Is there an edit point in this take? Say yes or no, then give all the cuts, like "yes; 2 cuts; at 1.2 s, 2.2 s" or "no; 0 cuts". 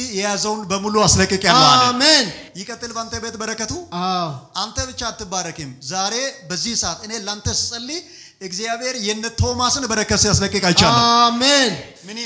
no; 0 cuts